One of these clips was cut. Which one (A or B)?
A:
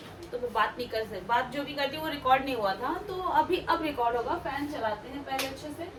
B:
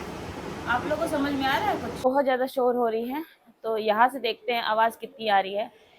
B